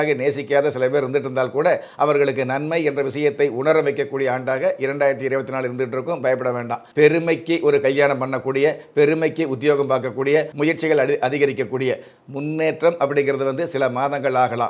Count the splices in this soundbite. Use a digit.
2